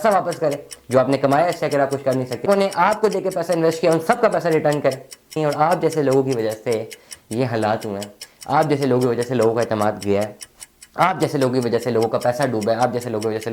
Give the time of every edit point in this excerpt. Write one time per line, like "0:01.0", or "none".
0:02.4
0:05.4